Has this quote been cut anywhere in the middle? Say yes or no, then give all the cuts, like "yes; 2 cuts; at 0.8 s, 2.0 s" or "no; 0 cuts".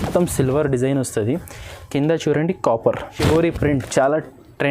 yes; 1 cut; at 3.1 s